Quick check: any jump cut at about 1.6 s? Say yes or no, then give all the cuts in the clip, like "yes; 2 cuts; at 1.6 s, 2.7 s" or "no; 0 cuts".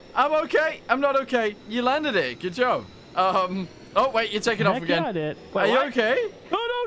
yes; 1 cut; at 1.6 s